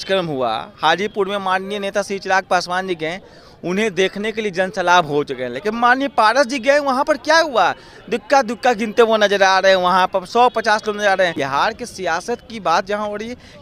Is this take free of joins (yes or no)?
no